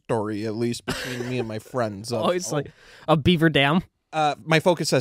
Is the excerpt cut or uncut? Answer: uncut